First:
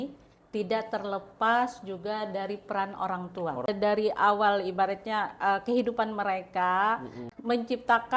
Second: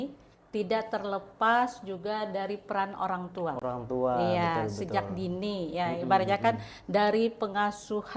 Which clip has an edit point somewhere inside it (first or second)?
first